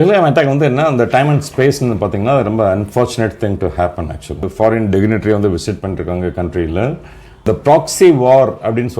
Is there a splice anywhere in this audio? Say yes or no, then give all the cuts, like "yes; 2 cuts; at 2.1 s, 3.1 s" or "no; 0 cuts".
yes; 2 cuts; at 4.5 s, 7.5 s